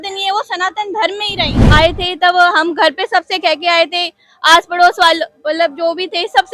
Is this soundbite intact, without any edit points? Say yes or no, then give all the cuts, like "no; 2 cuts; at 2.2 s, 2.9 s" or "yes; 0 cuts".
no; 1 cut; at 1.6 s